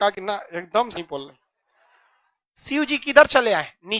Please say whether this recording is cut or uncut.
cut